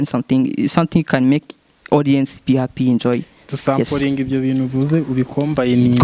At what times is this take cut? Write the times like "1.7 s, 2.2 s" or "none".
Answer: none

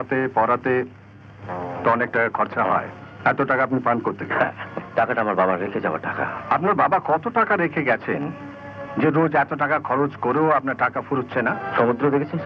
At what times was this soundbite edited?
3.0 s, 4.7 s, 6.3 s, 11.6 s

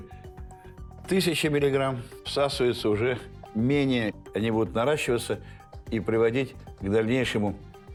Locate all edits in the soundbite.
none

